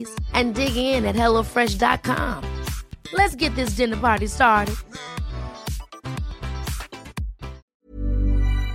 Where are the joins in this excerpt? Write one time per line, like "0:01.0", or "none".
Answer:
0:07.7